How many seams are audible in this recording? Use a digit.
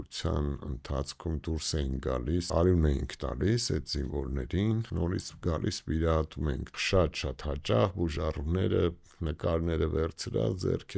3